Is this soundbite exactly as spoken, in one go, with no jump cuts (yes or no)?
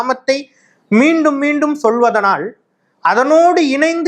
yes